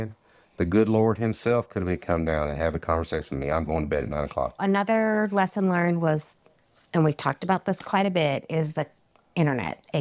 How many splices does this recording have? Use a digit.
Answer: 1